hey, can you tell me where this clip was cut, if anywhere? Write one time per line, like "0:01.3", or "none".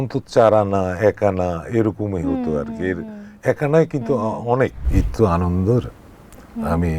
0:04.8